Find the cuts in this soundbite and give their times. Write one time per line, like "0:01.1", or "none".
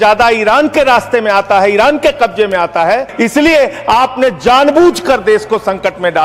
0:03.1